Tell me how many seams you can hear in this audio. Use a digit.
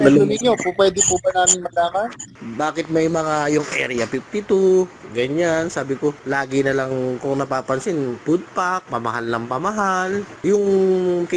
4